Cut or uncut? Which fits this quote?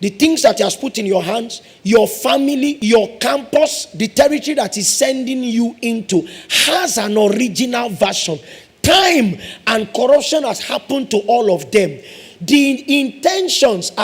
cut